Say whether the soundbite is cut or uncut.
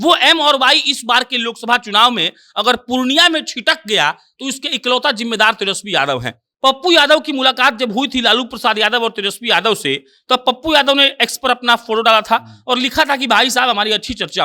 cut